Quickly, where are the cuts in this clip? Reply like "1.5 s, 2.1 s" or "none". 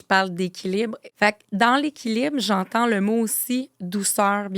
1.0 s

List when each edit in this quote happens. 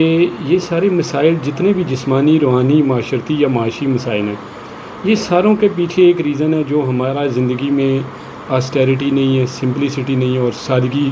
none

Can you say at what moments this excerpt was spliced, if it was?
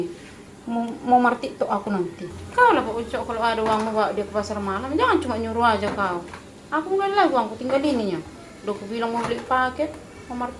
none

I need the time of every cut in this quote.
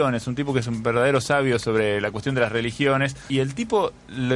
3.2 s

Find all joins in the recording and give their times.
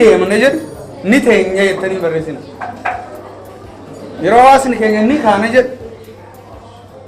none

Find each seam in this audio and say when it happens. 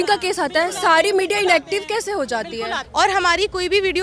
2.8 s

